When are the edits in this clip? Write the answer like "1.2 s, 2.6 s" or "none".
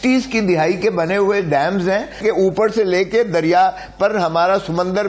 2.2 s

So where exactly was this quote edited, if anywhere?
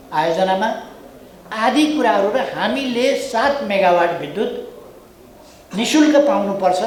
none

